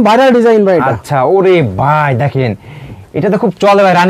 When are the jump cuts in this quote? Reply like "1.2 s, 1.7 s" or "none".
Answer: none